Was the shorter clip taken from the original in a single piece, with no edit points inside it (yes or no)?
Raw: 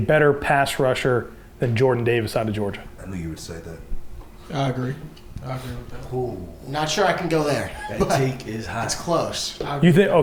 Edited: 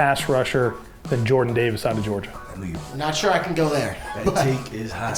no